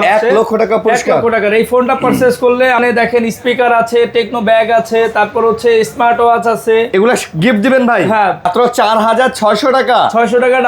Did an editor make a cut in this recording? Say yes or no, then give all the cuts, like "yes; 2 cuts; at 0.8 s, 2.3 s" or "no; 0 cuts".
yes; 2 cuts; at 2.8 s, 8.5 s